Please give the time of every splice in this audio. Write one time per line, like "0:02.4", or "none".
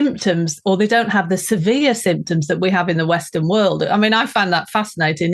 none